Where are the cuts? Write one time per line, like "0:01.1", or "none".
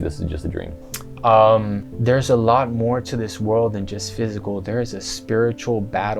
0:01.9